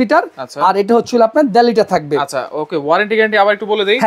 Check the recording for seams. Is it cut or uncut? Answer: uncut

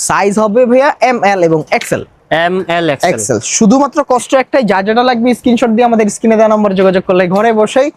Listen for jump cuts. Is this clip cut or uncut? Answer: uncut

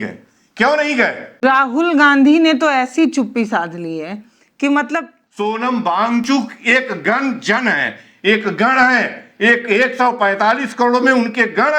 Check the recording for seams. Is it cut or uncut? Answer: cut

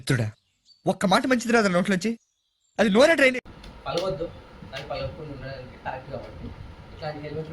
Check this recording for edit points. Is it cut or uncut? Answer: uncut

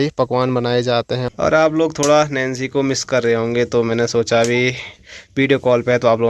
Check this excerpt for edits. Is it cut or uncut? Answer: cut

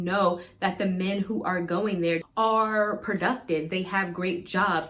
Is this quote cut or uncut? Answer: cut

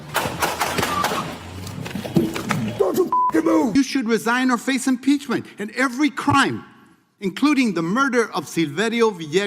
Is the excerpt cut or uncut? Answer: cut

